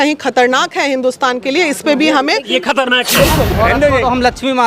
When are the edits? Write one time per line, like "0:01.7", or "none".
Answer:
0:03.5